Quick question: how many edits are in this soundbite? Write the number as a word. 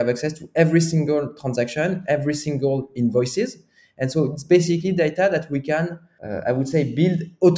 zero